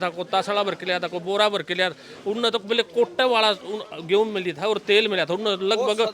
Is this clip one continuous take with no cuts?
yes; 0 cuts

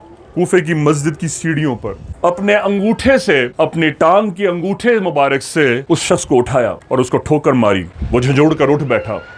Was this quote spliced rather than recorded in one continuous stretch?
yes; 2 cuts; at 2.0 s, 7.9 s

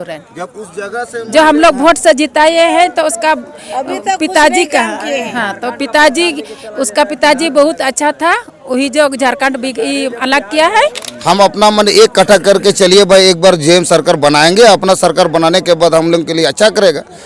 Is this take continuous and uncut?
no; 1 cut; at 11.1 s

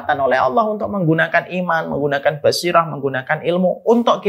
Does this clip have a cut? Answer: no; 0 cuts

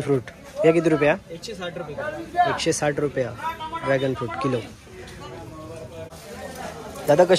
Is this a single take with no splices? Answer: yes; 0 cuts

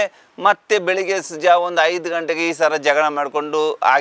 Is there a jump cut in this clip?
no; 0 cuts

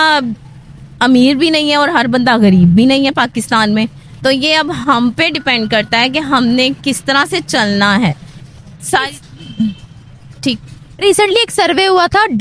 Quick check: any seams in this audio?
no; 0 cuts

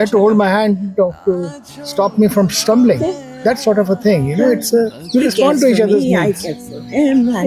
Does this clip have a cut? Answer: no; 0 cuts

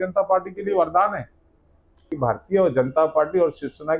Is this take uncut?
no; 1 cut; at 2.0 s

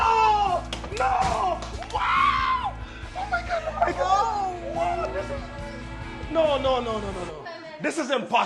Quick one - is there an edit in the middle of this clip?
no; 0 cuts

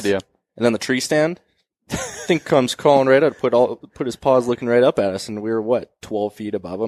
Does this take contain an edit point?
no; 0 cuts

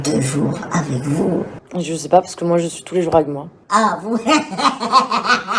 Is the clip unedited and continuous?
yes; 0 cuts

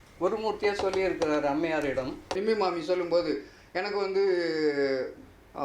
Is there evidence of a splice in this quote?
yes; 1 cut; at 2.3 s

